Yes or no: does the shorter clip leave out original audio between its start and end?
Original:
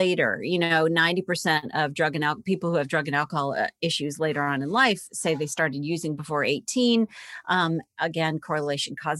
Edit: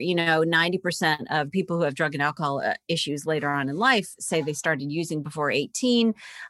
yes